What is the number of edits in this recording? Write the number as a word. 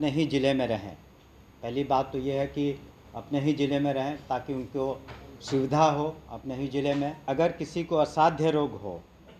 one